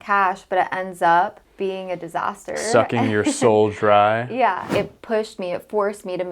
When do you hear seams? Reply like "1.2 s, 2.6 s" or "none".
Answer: 1.4 s, 4.7 s